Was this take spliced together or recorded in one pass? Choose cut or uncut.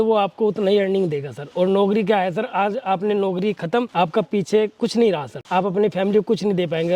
cut